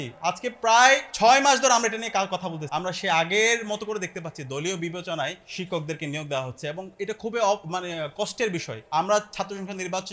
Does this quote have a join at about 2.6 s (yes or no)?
yes